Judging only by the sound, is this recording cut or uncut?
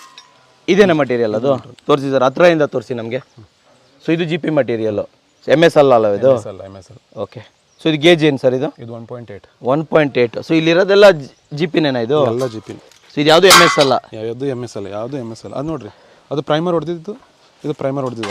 uncut